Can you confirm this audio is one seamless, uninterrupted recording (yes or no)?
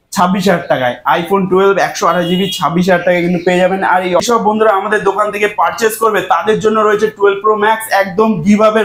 no